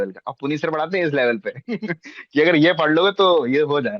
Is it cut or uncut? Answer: uncut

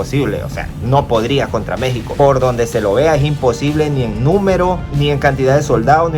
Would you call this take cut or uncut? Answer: uncut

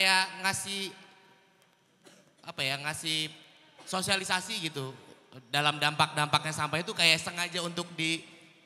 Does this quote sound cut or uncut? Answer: uncut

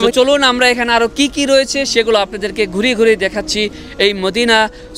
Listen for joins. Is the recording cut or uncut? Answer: uncut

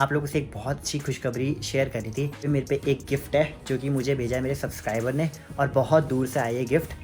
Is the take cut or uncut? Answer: cut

